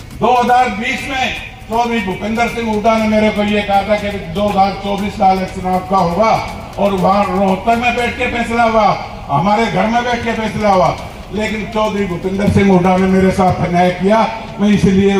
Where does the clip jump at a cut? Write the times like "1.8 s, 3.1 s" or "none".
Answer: none